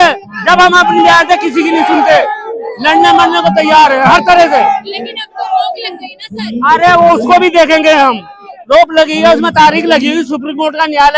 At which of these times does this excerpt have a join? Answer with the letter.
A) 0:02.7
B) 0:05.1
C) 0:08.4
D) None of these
D